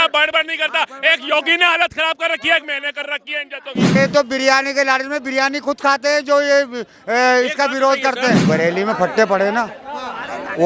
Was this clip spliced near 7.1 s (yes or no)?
no